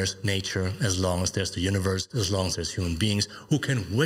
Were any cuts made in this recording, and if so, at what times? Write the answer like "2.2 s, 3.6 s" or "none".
2.1 s